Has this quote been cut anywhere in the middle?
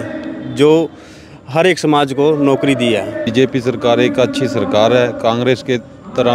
yes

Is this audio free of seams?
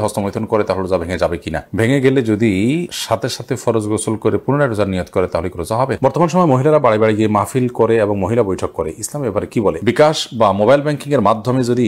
no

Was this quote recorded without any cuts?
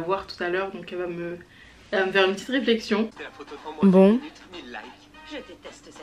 no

